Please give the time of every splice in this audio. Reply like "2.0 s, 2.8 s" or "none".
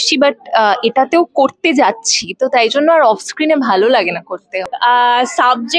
4.5 s